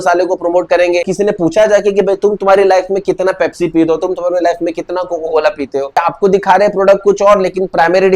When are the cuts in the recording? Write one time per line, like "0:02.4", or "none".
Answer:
0:01.1
0:05.9